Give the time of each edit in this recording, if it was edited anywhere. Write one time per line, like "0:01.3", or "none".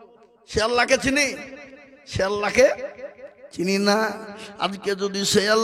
none

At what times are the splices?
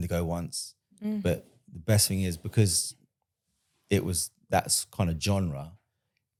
none

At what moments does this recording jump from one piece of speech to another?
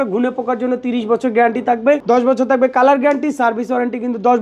none

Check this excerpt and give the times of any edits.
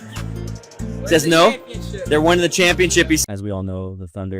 0:03.2

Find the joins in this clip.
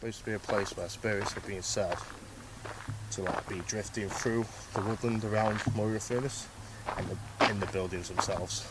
none

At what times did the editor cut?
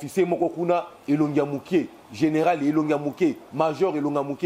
none

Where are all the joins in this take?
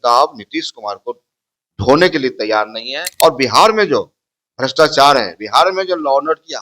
0:03.0

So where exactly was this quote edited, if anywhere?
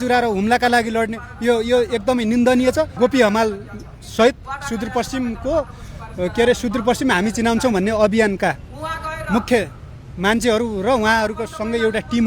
0:02.9

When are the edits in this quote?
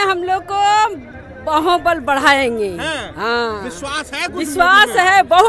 none

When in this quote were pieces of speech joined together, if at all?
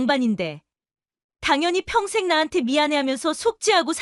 none

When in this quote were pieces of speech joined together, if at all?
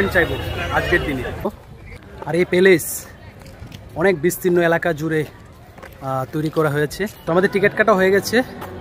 0:01.5
0:07.2

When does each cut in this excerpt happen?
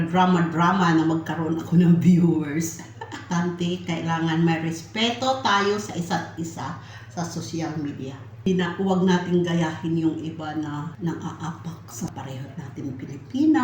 0:03.3
0:08.5
0:10.9
0:12.1

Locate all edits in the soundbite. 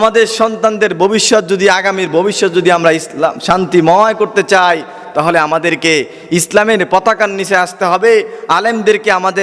none

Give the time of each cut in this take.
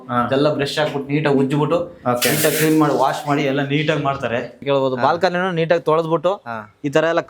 0:04.6

